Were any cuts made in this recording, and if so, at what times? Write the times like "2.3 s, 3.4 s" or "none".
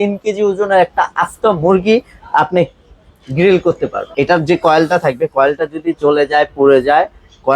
4.0 s